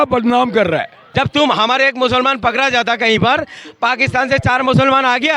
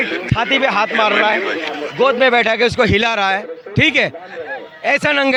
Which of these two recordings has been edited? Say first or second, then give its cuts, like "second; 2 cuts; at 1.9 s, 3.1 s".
first; 1 cut; at 1.0 s